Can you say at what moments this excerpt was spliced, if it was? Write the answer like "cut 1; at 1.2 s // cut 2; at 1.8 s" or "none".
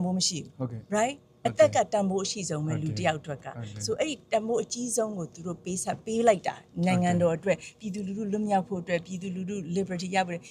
none